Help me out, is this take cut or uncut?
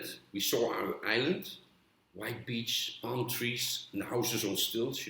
uncut